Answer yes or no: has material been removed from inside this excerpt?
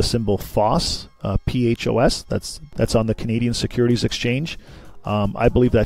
yes